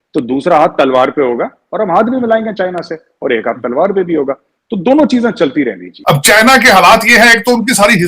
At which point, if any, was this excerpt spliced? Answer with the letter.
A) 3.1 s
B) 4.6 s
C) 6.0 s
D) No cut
C